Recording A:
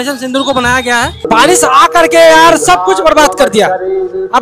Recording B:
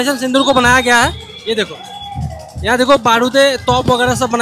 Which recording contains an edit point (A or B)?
A